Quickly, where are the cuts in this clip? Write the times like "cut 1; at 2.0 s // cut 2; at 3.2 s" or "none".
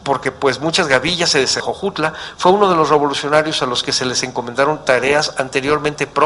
none